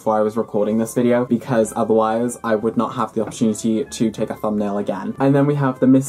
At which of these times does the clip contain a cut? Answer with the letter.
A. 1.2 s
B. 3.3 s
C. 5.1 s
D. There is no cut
D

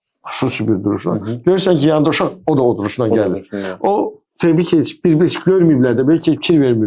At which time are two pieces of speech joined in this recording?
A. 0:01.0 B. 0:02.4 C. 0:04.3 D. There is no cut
D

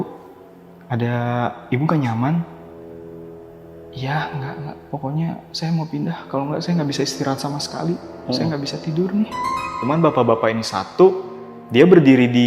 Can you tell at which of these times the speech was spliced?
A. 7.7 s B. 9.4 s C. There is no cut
B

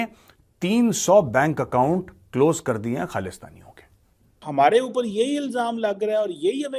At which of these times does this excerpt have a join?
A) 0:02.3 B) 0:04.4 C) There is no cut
B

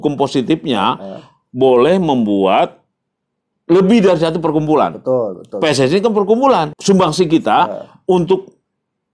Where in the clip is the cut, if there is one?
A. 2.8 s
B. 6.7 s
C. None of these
B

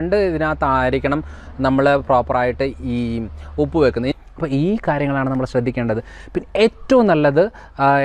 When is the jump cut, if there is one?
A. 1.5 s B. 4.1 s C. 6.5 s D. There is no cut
B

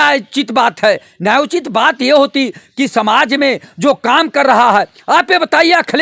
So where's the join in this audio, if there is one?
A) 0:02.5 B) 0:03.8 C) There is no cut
C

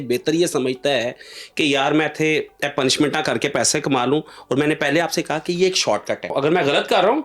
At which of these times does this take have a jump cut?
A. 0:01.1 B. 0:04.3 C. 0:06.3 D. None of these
C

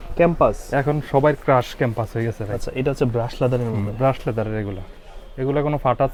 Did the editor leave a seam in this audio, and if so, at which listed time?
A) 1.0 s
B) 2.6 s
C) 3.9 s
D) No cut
D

